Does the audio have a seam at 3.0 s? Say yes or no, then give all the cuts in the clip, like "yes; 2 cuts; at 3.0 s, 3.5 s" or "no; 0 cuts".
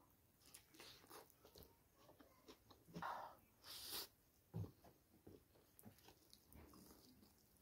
yes; 1 cut; at 3.0 s